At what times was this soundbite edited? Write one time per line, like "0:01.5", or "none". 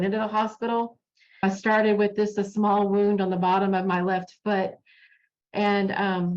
0:01.4